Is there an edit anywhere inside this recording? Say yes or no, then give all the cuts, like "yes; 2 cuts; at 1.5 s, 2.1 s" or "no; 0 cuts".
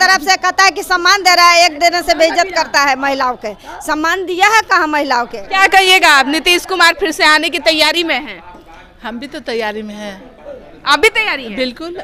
no; 0 cuts